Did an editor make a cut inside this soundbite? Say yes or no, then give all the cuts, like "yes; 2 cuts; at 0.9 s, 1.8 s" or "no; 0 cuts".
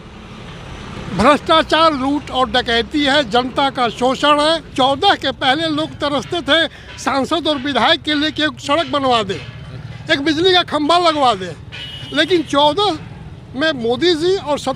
yes; 1 cut; at 4.7 s